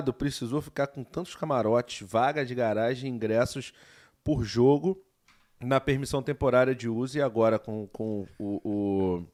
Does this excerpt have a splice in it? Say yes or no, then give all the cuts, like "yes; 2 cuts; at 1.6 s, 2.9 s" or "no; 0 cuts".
no; 0 cuts